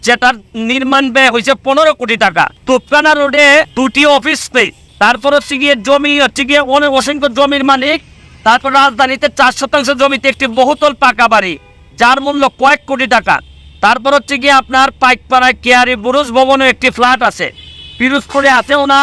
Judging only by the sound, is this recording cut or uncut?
cut